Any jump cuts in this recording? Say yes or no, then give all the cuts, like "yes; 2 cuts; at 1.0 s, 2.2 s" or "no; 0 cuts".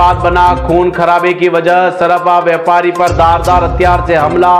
no; 0 cuts